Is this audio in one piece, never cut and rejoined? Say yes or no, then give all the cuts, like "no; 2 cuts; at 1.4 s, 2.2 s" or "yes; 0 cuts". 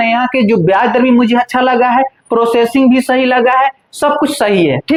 yes; 0 cuts